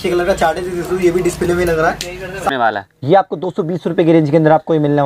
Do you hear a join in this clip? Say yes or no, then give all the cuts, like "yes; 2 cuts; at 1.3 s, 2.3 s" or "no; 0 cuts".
yes; 1 cut; at 2.5 s